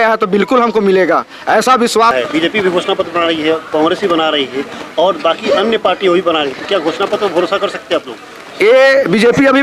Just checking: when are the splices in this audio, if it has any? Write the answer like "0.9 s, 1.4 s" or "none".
2.1 s